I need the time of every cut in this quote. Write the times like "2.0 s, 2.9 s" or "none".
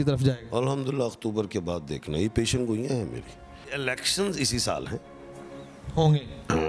3.7 s

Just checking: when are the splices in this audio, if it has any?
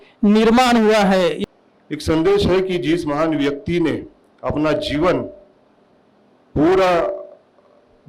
1.5 s

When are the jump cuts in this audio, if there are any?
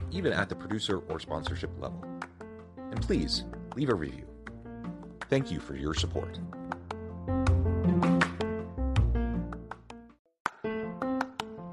10.2 s

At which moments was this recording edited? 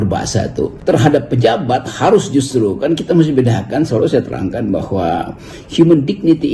none

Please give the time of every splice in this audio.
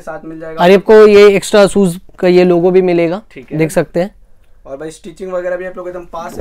none

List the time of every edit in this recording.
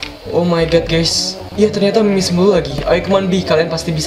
1.4 s

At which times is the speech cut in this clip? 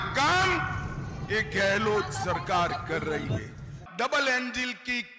3.8 s

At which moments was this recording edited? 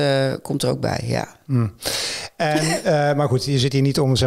none

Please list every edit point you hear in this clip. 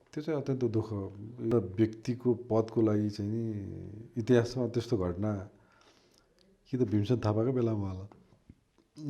1.5 s

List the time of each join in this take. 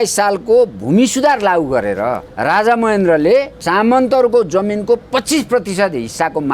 2.3 s, 3.6 s

